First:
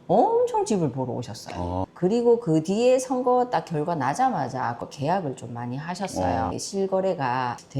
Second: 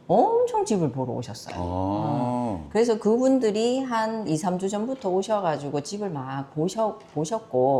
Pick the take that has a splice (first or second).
first